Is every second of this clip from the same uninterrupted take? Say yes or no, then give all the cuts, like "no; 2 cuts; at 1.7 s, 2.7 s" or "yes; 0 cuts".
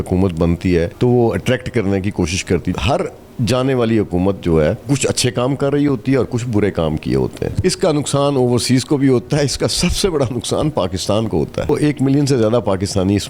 no; 5 cuts; at 0.9 s, 2.7 s, 4.9 s, 7.6 s, 11.7 s